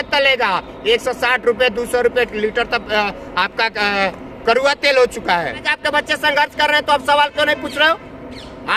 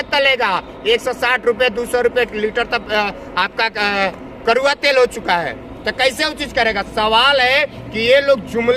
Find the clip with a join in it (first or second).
first